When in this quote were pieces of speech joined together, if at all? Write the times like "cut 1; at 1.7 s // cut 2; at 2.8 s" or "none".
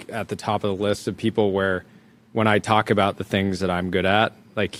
none